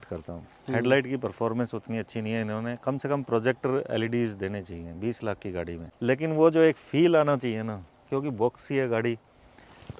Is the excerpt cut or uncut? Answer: cut